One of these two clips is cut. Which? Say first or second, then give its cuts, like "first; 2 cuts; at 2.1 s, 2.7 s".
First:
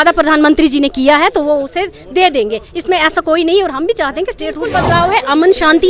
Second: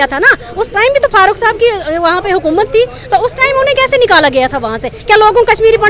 first; 1 cut; at 4.7 s